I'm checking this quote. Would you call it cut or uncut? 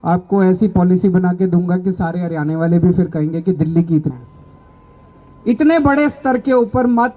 cut